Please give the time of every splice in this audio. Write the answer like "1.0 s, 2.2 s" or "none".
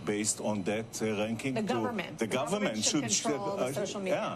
none